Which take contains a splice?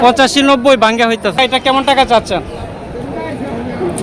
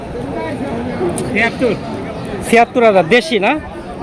first; 1 cut; at 1.4 s

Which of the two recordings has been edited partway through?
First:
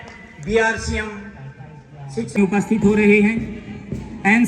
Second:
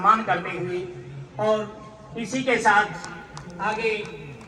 first; 1 cut; at 2.4 s

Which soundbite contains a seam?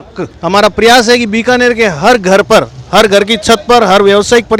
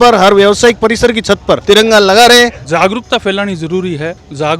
second; 1 cut; at 2.6 s

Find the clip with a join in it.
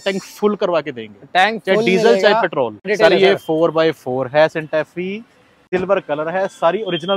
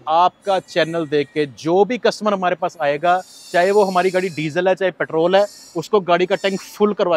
first; 2 cuts; at 2.9 s, 5.4 s

